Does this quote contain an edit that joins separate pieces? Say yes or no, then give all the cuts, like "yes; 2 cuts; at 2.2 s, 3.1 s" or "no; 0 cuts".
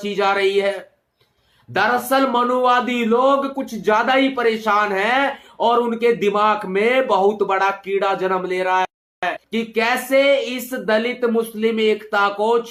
no; 0 cuts